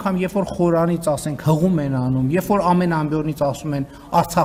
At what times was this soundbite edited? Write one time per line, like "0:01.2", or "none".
none